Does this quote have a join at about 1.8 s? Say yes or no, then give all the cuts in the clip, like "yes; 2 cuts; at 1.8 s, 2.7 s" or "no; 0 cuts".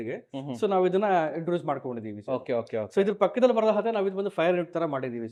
no; 0 cuts